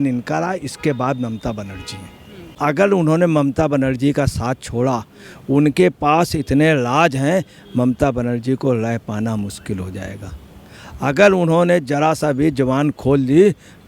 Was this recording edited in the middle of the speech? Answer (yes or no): yes